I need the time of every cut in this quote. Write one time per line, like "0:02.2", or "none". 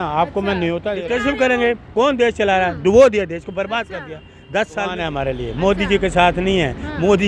0:00.9
0:05.0